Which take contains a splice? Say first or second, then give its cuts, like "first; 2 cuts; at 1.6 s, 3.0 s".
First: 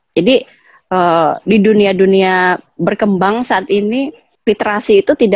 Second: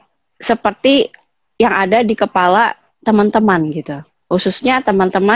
first; 1 cut; at 4.2 s